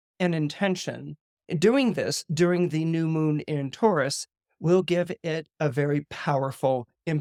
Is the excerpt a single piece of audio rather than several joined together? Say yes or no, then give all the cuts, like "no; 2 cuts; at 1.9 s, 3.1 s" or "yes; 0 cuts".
yes; 0 cuts